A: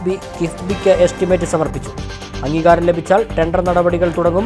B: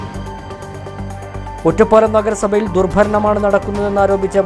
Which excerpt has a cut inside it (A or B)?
B